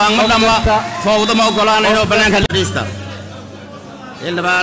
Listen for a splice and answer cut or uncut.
cut